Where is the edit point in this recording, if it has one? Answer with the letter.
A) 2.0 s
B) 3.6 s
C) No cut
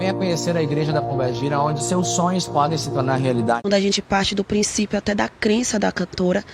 B